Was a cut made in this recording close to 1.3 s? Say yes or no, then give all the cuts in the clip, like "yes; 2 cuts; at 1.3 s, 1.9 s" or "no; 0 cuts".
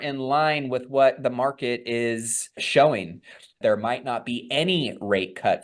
no; 2 cuts; at 2.6 s, 3.6 s